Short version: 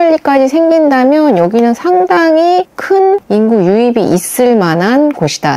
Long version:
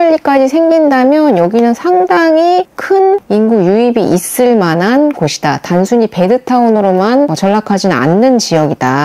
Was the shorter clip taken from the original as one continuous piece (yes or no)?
yes